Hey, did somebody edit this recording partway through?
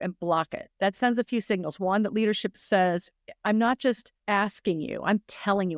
yes; 1 cut; at 4.1 s

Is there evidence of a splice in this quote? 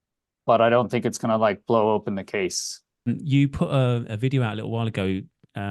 yes; 1 cut; at 3.1 s

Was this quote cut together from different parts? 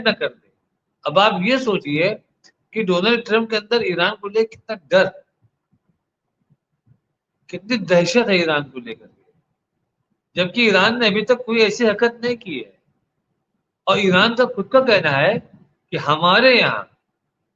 no; 0 cuts

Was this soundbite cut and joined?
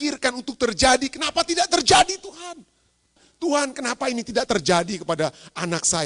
yes; 1 cut; at 3.2 s

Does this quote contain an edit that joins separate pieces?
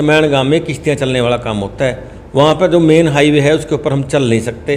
no; 0 cuts

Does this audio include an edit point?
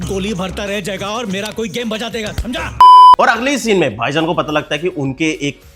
no; 0 cuts

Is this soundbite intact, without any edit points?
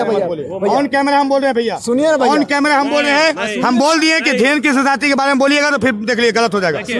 yes; 0 cuts

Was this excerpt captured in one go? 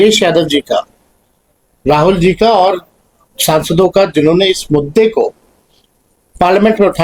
yes; 0 cuts

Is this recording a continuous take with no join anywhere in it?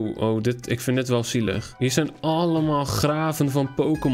yes; 0 cuts

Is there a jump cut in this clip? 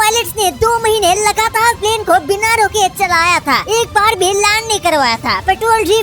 no; 0 cuts

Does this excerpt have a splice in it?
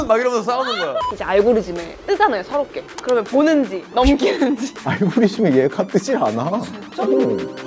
yes; 5 cuts; at 1.2 s, 1.9 s, 2.9 s, 3.8 s, 4.8 s

